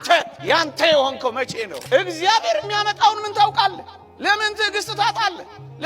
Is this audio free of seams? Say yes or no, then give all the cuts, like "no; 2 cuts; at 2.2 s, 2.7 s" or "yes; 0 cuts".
no; 1 cut; at 1.8 s